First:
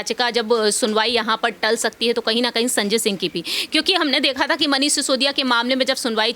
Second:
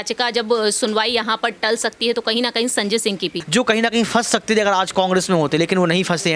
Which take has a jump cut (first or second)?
second